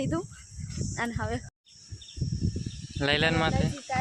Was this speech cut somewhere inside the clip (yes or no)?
yes